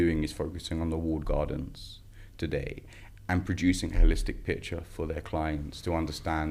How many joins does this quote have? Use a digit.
0